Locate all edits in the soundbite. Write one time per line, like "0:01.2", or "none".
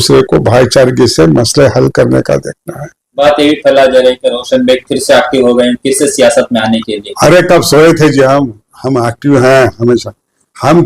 0:03.0